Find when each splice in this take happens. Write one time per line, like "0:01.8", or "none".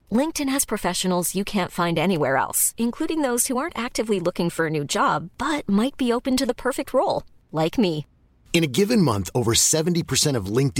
none